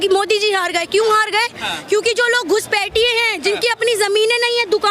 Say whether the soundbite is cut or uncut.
uncut